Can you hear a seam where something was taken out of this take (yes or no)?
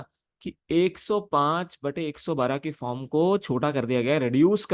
no